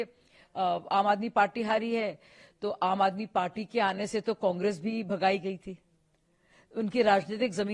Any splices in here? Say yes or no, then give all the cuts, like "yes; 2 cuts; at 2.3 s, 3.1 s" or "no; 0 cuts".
no; 0 cuts